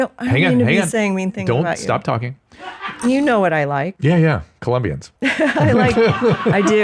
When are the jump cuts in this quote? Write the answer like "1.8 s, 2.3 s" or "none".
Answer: 3.0 s, 3.9 s, 5.0 s